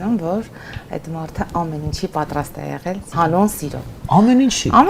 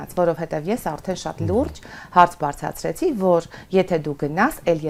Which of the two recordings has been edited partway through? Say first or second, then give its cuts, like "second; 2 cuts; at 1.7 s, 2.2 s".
first; 1 cut; at 3.0 s